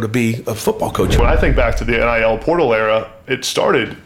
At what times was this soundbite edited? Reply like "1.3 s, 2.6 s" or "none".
1.2 s